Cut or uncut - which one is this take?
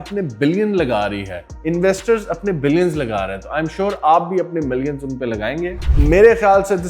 cut